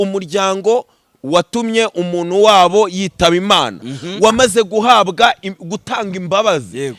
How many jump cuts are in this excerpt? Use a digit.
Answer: 0